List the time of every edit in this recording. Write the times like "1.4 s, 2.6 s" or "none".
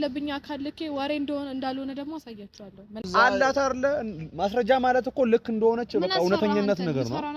3.1 s